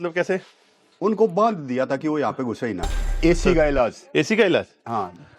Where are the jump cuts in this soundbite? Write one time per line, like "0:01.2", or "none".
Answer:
0:02.9